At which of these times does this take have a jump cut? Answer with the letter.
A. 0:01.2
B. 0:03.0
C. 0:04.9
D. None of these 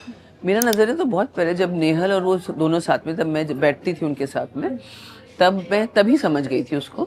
D